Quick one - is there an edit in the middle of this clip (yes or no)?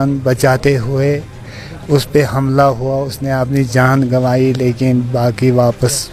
no